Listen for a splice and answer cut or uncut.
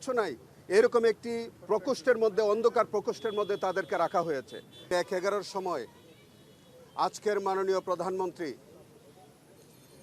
cut